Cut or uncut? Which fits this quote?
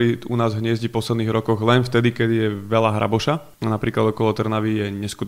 cut